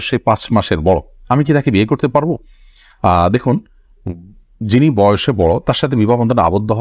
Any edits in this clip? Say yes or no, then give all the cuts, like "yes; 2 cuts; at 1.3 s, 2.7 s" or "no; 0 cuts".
no; 0 cuts